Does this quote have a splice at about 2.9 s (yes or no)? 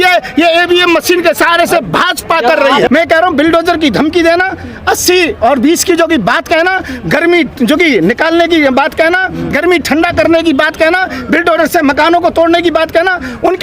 yes